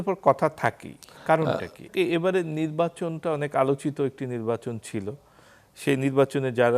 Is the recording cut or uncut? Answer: cut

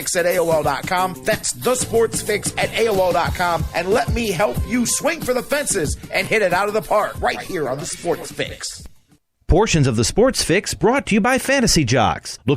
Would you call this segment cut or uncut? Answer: cut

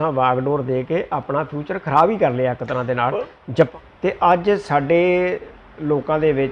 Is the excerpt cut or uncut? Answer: cut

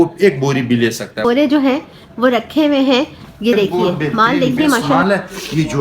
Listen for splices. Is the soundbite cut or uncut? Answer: cut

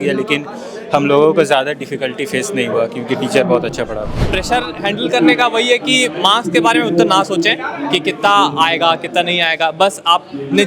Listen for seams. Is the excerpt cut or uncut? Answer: cut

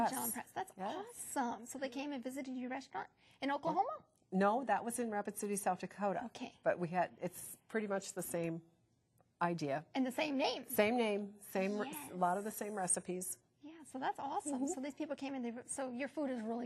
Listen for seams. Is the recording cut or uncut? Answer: uncut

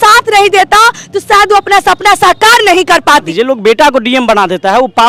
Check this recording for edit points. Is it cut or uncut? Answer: cut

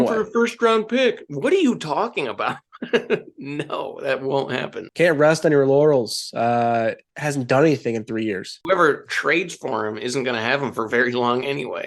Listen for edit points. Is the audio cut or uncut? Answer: cut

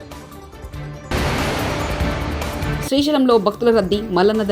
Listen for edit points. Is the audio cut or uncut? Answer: cut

